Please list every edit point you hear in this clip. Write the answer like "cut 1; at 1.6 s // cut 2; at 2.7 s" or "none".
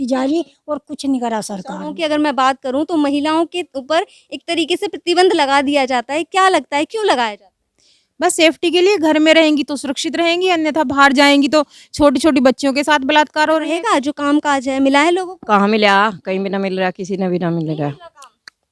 cut 1; at 2.0 s // cut 2; at 13.7 s